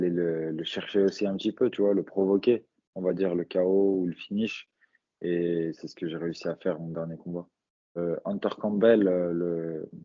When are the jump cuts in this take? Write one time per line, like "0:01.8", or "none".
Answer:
0:08.0